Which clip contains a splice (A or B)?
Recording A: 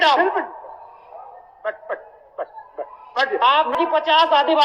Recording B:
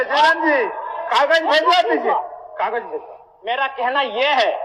A